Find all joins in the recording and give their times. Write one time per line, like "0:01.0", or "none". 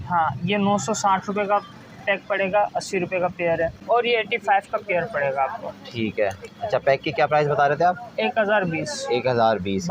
0:03.8